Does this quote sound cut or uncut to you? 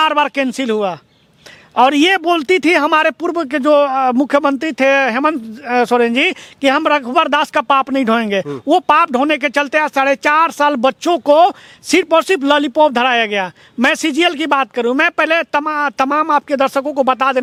uncut